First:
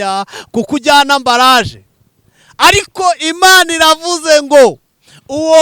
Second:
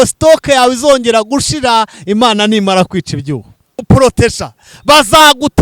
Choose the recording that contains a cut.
second; 1 cut; at 3.8 s

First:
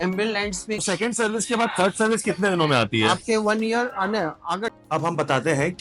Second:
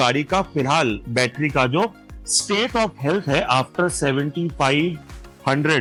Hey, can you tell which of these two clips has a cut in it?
first; 2 cuts; at 0.8 s, 4.7 s

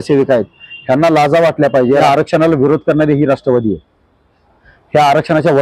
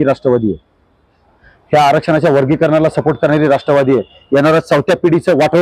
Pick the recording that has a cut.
first; 1 cut; at 2.0 s

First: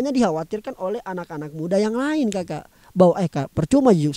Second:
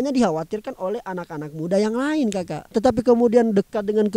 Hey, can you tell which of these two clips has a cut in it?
second; 1 cut; at 2.8 s

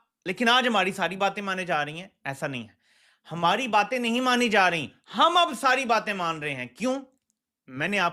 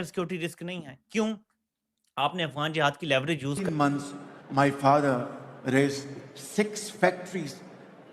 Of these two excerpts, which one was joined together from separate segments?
second; 1 cut; at 3.6 s

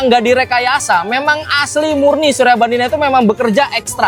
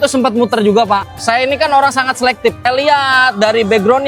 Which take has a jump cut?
second; 2 cuts; at 1.1 s, 2.6 s

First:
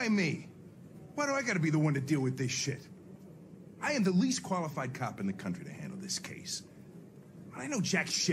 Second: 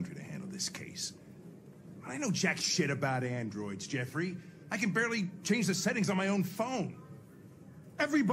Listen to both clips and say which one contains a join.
second; 1 cut; at 4.5 s

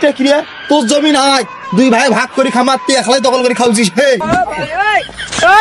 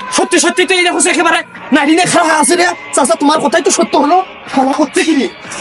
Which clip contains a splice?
first; 1 cut; at 4.2 s

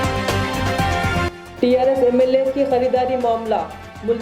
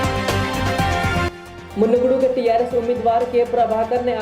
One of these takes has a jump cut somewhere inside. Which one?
second; 1 cut; at 1.1 s

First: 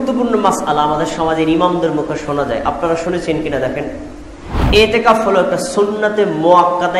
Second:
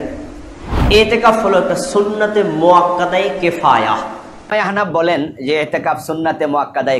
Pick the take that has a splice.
second; 1 cut; at 4.5 s

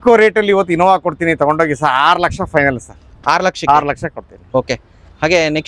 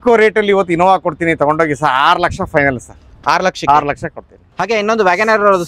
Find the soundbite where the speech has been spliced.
second; 1 cut; at 4.3 s

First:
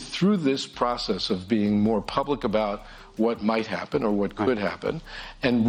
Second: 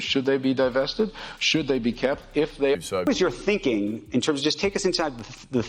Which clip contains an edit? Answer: second; 1 cut; at 3.1 s

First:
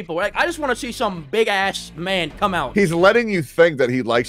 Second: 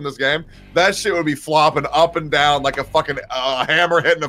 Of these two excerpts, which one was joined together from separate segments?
first; 1 cut; at 2.6 s

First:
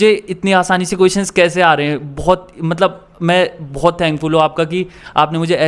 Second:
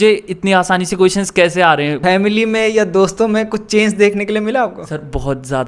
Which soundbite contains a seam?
second; 1 cut; at 2.0 s

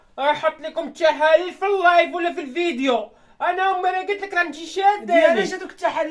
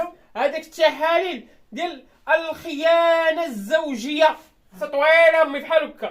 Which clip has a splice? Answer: second; 1 cut; at 4.8 s

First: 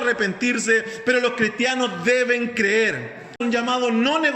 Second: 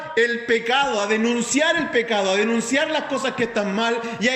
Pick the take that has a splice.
first; 1 cut; at 3.4 s

